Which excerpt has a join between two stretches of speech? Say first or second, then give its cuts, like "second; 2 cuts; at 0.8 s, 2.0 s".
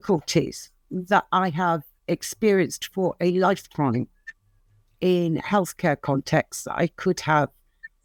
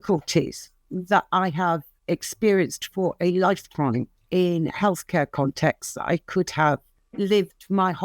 second; 2 cuts; at 4.2 s, 7.0 s